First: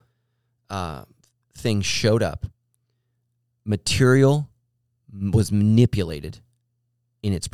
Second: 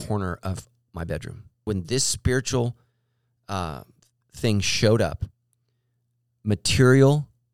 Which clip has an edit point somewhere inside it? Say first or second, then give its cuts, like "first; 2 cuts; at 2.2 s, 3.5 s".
second; 1 cut; at 1.6 s